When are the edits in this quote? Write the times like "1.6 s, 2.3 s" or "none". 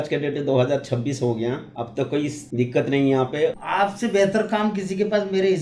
2.3 s, 3.6 s